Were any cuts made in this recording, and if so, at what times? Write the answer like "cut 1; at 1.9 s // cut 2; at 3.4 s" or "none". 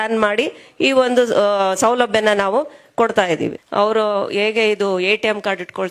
cut 1; at 3.6 s